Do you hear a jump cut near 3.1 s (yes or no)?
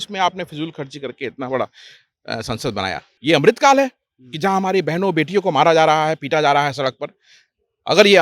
yes